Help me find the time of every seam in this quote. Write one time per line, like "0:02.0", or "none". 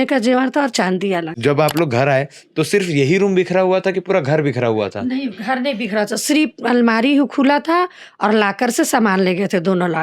0:01.3

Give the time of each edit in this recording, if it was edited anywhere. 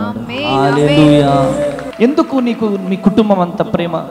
0:01.8

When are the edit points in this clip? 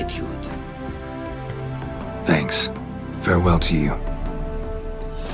none

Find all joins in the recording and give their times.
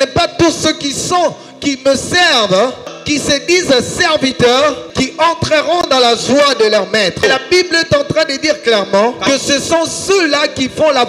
0:02.9
0:04.8
0:07.2
0:09.2

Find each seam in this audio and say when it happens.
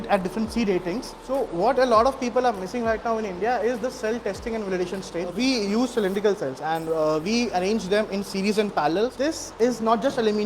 0:01.2
0:05.3
0:09.2

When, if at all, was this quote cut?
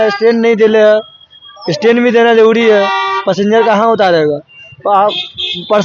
none

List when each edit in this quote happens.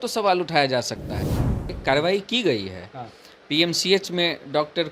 0:01.5

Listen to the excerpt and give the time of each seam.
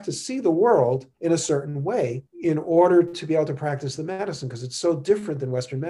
0:01.1
0:02.3

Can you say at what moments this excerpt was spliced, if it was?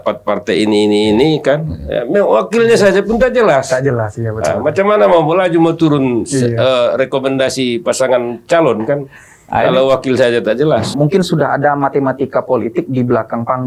0:10.9

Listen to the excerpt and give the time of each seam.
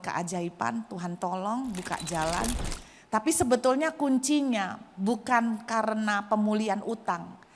0:02.7

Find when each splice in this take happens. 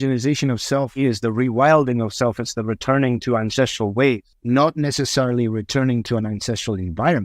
0:01.0
0:04.3

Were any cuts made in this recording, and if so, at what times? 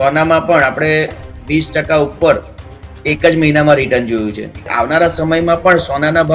0:04.7

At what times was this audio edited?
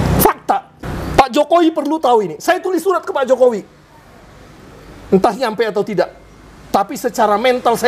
none

